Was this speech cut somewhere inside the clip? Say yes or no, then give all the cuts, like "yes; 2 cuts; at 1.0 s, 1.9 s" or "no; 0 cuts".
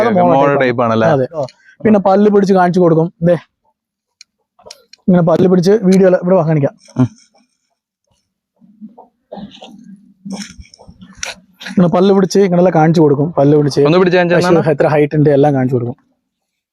yes; 1 cut; at 1.5 s